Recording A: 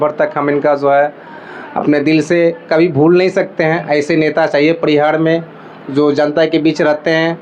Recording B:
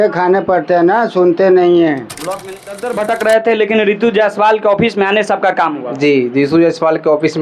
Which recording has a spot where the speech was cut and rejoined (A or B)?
B